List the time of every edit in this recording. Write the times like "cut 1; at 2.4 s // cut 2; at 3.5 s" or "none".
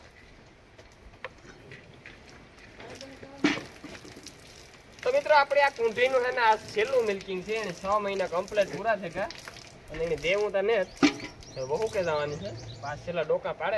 none